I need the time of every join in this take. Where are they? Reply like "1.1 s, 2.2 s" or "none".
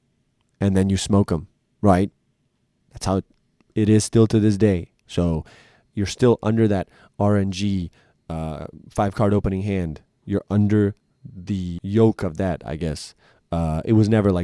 11.8 s